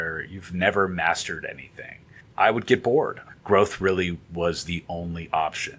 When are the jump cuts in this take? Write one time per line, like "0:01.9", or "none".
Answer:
0:02.2
0:03.2

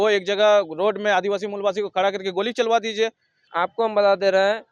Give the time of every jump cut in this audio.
0:03.5

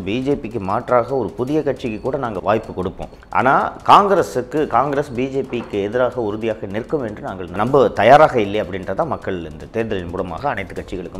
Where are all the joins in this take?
0:02.4
0:07.6

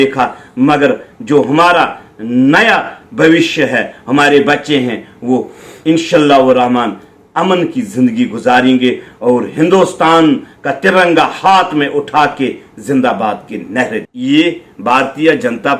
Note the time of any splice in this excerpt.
0:14.1

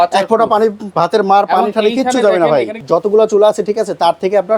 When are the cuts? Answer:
0:02.8

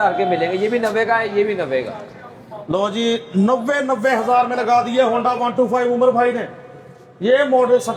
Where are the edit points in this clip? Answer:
none

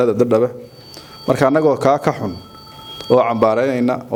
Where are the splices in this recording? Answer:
none

